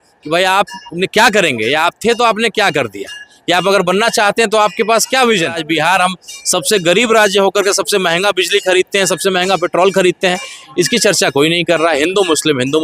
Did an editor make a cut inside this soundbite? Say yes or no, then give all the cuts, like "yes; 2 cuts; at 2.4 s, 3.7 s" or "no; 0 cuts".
yes; 1 cut; at 5.6 s